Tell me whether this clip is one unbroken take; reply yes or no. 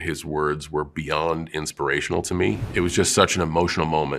no